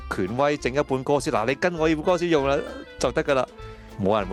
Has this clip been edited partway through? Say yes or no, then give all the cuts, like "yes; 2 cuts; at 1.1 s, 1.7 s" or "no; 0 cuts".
no; 0 cuts